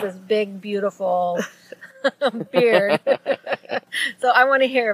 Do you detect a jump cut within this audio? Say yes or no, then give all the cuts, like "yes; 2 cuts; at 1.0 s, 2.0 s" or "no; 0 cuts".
no; 0 cuts